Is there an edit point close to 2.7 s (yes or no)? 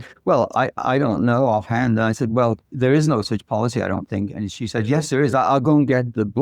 yes